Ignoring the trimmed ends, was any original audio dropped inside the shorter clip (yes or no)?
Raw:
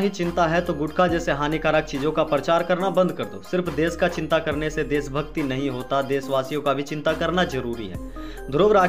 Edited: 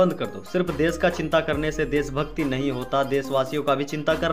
no